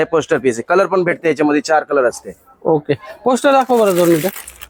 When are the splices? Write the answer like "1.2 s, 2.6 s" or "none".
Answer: none